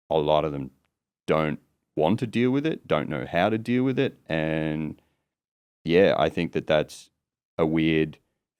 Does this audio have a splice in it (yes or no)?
no